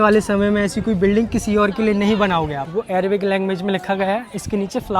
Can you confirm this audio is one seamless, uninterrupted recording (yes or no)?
no